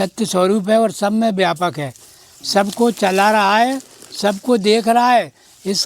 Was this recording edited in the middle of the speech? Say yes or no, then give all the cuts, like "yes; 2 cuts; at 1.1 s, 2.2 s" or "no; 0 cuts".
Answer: no; 0 cuts